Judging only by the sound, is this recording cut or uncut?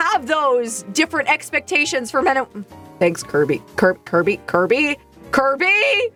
uncut